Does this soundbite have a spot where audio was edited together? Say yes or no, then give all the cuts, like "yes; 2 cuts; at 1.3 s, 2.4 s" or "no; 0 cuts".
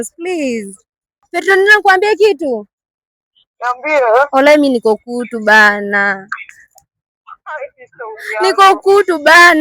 yes; 1 cut; at 1.2 s